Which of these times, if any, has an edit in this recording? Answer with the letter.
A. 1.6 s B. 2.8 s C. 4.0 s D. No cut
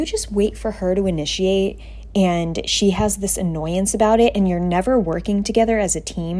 D